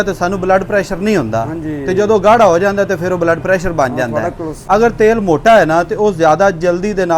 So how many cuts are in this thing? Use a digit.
1